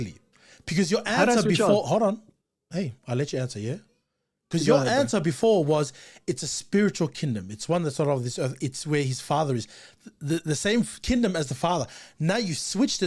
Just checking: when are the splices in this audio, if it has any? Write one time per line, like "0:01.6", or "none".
0:12.0